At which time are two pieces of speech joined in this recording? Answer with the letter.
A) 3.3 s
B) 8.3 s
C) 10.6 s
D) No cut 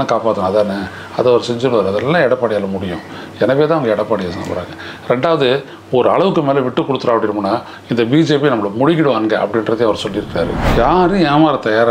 C